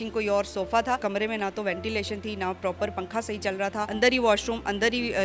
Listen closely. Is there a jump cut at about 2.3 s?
no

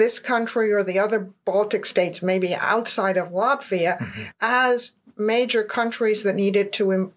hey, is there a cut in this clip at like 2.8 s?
no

